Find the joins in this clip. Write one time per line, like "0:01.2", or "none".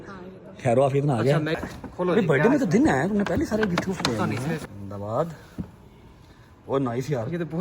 0:01.6
0:04.6